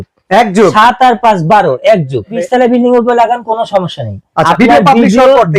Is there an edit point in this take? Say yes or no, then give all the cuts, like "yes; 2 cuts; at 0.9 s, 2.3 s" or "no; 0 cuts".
yes; 2 cuts; at 2.4 s, 4.5 s